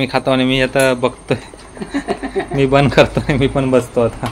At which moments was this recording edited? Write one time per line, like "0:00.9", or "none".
none